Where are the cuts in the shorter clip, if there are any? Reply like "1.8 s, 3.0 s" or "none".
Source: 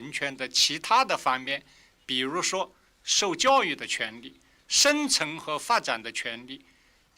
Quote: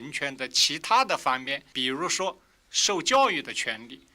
1.6 s